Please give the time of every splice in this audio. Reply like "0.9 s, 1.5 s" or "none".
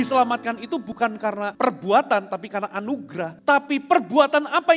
0.9 s, 3.3 s